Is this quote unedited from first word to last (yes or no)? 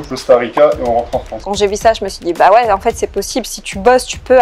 no